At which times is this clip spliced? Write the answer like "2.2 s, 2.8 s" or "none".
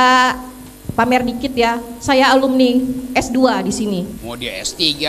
4.2 s